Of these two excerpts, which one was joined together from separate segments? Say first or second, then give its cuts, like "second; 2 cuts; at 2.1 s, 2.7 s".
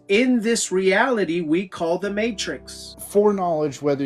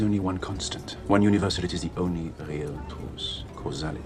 first; 1 cut; at 2.9 s